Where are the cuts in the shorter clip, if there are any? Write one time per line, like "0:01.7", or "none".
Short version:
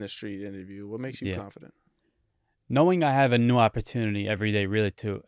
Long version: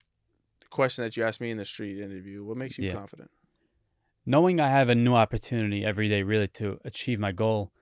none